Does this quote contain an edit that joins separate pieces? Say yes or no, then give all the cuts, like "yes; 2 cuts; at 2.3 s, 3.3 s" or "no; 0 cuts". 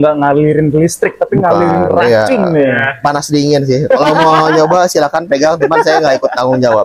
no; 0 cuts